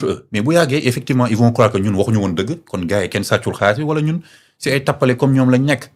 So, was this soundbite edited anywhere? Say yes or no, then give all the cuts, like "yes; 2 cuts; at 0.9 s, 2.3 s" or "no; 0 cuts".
no; 0 cuts